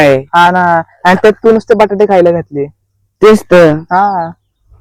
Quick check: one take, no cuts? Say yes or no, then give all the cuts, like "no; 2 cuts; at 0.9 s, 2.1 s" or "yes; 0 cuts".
yes; 0 cuts